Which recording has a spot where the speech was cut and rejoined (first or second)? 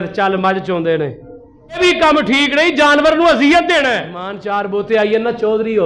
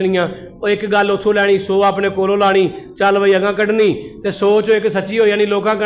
first